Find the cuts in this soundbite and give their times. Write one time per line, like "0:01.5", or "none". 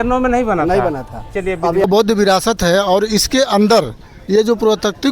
0:01.8